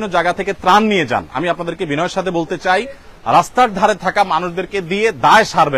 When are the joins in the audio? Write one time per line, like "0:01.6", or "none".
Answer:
none